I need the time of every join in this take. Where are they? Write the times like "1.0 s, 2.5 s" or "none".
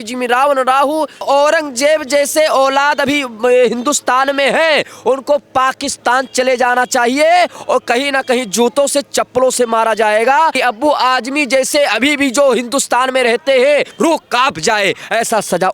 1.2 s, 10.6 s, 13.9 s